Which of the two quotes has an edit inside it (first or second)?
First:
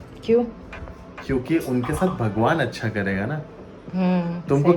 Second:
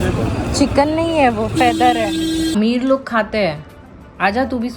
second